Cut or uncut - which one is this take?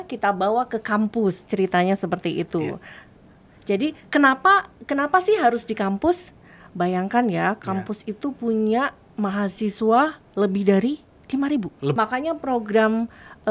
cut